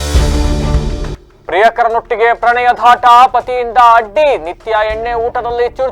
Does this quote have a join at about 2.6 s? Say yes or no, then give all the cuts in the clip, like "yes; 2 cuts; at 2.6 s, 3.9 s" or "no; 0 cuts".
no; 1 cut; at 1.2 s